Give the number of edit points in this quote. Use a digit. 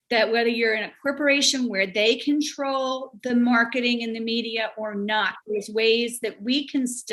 0